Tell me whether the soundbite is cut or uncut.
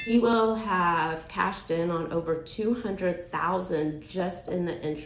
uncut